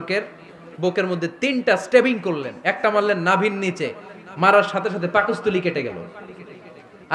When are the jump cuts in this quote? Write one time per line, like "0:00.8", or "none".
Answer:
none